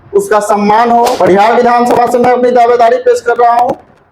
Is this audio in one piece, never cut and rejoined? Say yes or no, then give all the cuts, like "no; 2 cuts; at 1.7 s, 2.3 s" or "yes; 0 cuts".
no; 1 cut; at 1.1 s